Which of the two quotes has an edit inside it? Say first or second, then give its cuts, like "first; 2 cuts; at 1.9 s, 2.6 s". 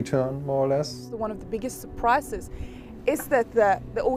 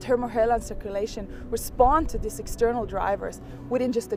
first; 1 cut; at 1.1 s